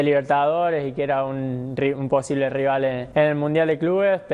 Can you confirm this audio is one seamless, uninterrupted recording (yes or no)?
no